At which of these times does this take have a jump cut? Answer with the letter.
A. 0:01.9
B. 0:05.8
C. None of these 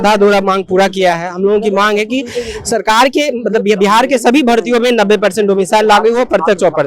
C